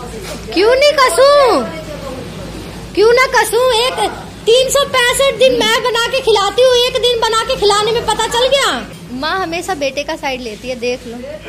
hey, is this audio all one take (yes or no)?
yes